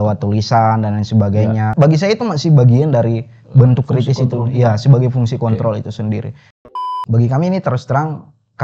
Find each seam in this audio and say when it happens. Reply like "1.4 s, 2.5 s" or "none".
1.7 s, 6.6 s